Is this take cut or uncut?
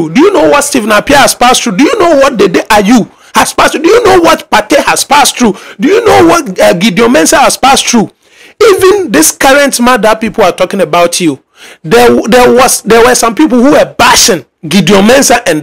cut